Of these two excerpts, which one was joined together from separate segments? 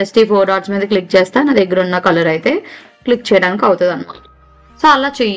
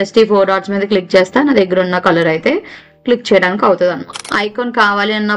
second; 1 cut; at 4.3 s

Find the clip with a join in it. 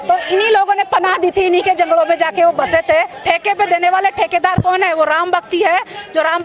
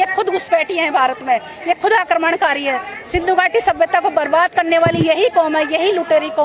first; 1 cut; at 3.1 s

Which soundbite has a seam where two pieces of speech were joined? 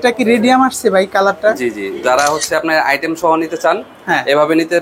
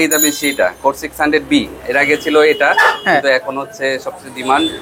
first; 1 cut; at 2.0 s

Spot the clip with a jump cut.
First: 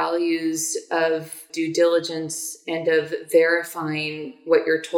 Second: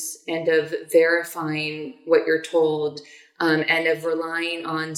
first; 1 cut; at 1.4 s

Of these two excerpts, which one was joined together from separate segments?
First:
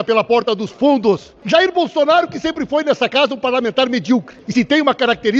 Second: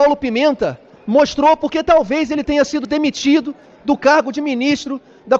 first; 2 cuts; at 1.3 s, 4.4 s

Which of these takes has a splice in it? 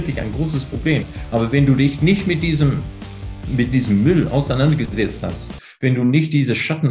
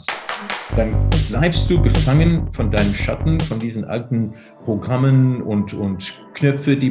first; 1 cut; at 1.2 s

